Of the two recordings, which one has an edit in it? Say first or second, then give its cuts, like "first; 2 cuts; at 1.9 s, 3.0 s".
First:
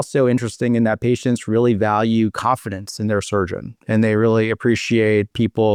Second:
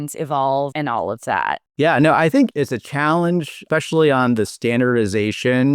second; 2 cuts; at 2.5 s, 3.6 s